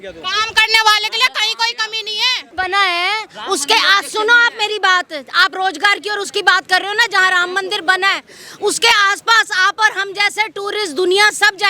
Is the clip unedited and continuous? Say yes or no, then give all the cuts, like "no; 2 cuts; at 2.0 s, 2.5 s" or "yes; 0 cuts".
no; 1 cut; at 2.4 s